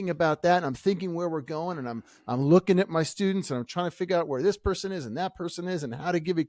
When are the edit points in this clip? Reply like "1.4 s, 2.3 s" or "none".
none